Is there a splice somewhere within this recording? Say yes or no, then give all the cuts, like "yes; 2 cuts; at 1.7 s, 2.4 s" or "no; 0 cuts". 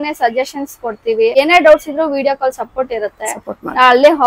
yes; 1 cut; at 1.3 s